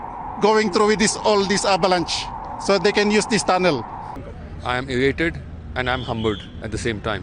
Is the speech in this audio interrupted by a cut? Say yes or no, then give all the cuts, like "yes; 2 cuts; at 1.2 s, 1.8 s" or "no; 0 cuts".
no; 0 cuts